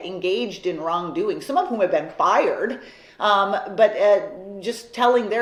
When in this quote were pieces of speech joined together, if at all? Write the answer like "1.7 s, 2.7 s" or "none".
none